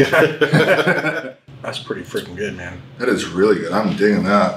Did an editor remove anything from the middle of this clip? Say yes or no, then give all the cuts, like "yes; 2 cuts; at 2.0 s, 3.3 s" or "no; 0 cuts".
yes; 1 cut; at 1.3 s